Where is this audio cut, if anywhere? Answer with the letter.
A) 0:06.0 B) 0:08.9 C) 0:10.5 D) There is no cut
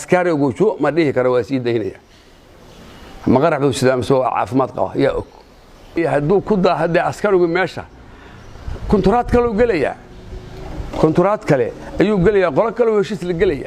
A